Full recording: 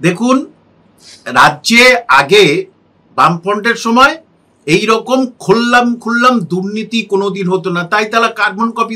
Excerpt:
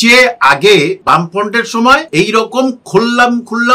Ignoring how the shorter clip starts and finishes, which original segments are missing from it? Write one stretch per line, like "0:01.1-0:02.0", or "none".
0:02.7-0:03.1
0:04.2-0:04.6

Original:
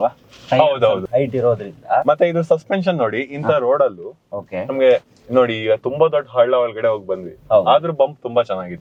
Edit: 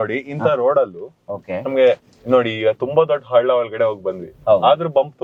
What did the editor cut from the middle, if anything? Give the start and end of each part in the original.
none

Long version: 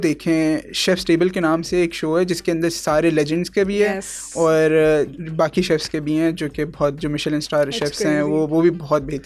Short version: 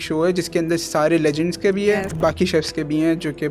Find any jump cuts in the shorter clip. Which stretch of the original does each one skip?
0:04.0-0:05.2

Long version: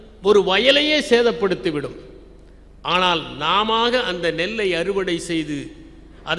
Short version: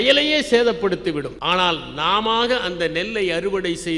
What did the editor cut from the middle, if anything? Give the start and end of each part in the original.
0:01.9-0:02.8

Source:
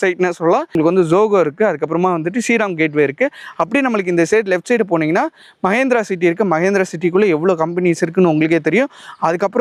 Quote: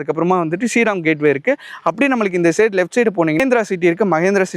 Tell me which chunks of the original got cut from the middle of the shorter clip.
0:05.1-0:05.8

